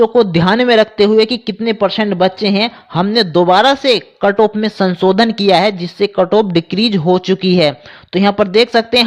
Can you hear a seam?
no; 0 cuts

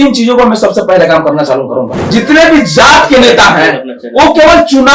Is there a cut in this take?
yes; 1 cut; at 2.0 s

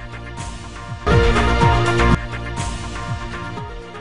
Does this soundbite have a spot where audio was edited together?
no; 0 cuts

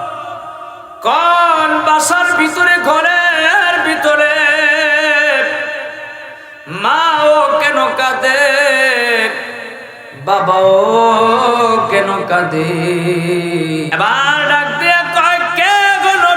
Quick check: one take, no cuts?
no; 1 cut; at 13.9 s

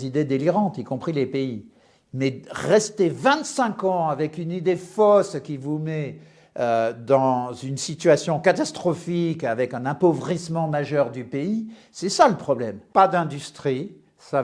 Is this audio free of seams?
no; 1 cut; at 12.8 s

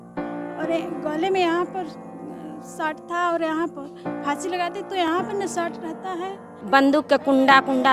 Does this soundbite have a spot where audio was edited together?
yes; 1 cut; at 6.6 s

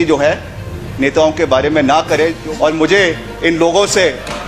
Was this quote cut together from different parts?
yes; 1 cut; at 2.4 s

